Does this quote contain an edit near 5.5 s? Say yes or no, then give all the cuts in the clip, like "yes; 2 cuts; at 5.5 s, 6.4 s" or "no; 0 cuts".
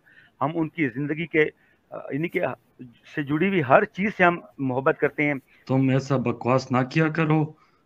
yes; 1 cut; at 5.5 s